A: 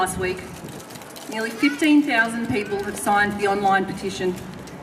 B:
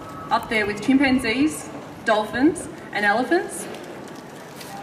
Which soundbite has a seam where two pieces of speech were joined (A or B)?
B